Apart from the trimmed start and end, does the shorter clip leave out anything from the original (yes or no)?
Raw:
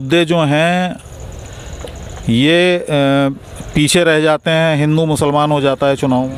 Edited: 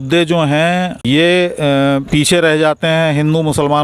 yes